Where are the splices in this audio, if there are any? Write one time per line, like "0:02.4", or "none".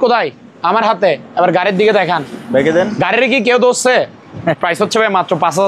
0:04.6